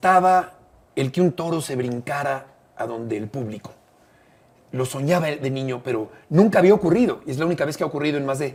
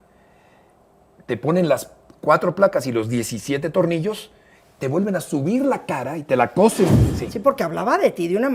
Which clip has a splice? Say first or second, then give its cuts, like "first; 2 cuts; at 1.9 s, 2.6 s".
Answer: second; 1 cut; at 7.0 s